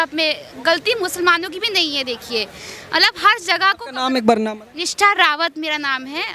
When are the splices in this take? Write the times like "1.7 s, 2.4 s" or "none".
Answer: none

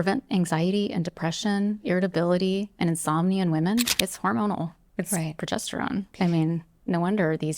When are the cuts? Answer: 3.9 s, 6.1 s

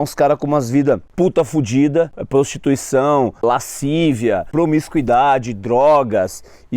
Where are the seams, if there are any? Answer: 1.1 s, 2.2 s, 3.4 s, 4.5 s

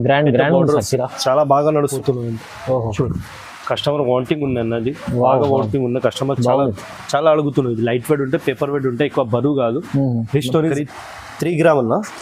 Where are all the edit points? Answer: 1.9 s, 10.7 s

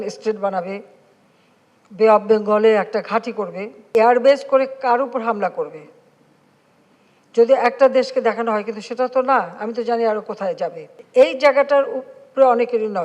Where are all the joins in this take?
3.9 s, 10.9 s

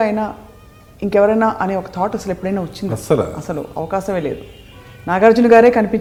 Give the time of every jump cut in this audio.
none

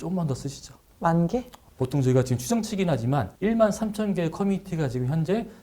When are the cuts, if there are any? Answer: 1.6 s

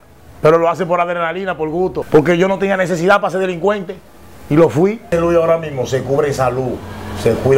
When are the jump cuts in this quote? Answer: 2.0 s, 5.1 s

